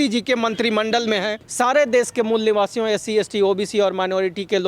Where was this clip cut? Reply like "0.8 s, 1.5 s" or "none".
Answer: 1.4 s